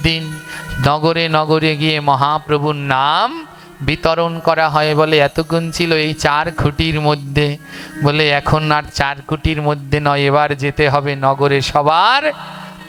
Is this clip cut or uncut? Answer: uncut